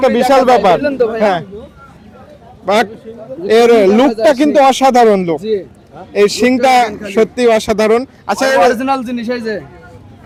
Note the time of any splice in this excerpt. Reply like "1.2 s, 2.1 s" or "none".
none